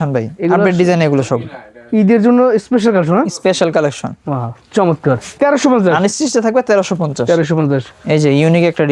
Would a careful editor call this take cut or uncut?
uncut